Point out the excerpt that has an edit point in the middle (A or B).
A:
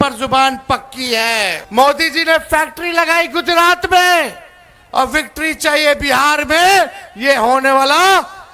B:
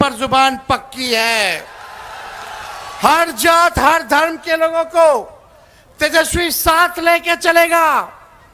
A